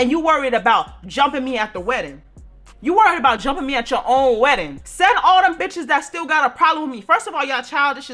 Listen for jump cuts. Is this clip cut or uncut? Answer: uncut